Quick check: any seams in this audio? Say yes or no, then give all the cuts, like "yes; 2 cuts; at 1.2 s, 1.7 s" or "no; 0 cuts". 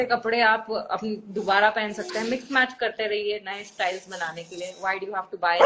no; 0 cuts